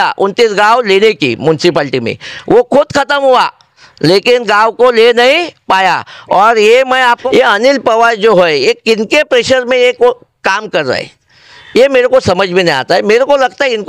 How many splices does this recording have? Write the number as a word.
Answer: one